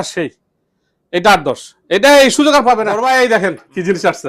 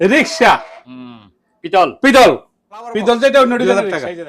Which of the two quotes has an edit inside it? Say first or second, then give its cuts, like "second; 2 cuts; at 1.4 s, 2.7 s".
first; 1 cut; at 2.9 s